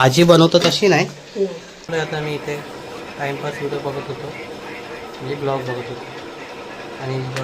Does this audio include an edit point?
yes; 1 cut; at 1.8 s

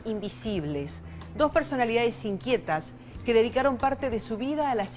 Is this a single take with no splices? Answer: no; 1 cut; at 2.3 s

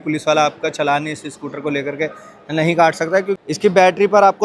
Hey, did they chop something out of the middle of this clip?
yes; 1 cut; at 3.4 s

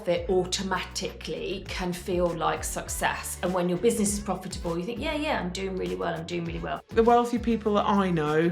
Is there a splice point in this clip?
yes; 1 cut; at 6.9 s

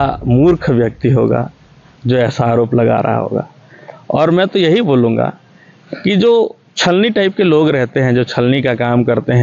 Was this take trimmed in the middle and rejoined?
no; 0 cuts

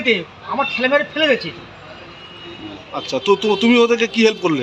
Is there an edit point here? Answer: no; 0 cuts

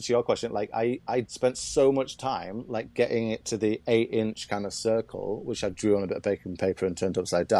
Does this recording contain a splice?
yes; 1 cut; at 1.3 s

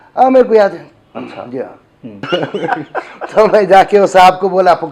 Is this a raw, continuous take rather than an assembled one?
no; 1 cut; at 2.3 s

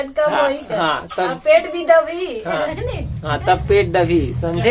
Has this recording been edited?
no; 0 cuts

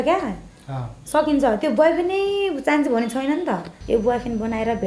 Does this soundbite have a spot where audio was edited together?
yes; 1 cut; at 3.7 s

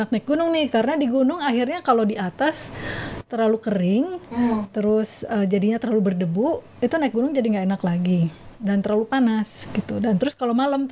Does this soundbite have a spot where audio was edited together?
no; 0 cuts

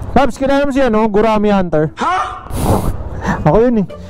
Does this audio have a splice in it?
yes; 1 cut; at 1.9 s

